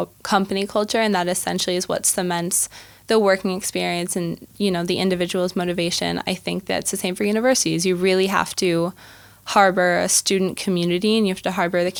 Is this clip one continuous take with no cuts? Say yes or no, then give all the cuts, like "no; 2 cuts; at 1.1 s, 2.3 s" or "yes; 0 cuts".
yes; 0 cuts